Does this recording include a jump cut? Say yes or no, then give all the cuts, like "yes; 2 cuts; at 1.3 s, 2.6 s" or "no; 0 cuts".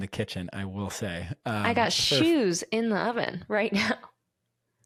no; 0 cuts